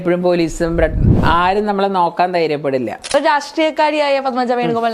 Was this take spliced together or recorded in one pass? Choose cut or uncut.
cut